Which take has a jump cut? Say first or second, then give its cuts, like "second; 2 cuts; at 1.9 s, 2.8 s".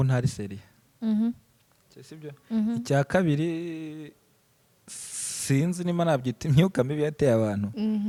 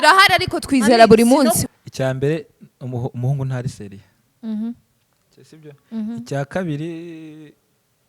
second; 1 cut; at 1.6 s